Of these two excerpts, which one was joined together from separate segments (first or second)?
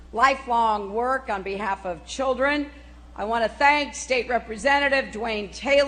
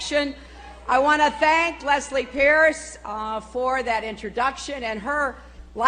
first